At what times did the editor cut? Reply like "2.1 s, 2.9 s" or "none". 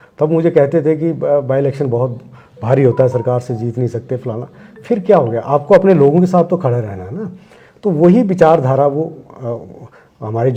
none